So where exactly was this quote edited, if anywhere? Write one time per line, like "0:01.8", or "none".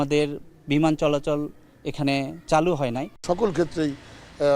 0:03.2